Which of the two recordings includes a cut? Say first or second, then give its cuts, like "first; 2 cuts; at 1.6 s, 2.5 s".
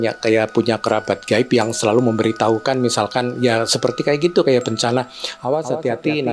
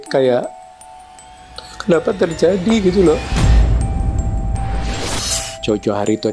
second; 1 cut; at 3.3 s